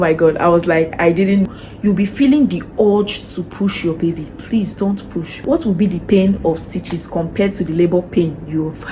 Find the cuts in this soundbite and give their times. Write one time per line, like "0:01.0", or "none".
0:01.6
0:05.4